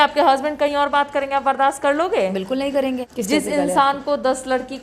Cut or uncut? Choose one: cut